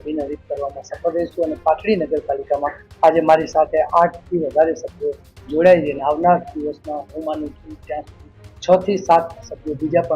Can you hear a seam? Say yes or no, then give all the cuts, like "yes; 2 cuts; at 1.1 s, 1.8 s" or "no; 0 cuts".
no; 0 cuts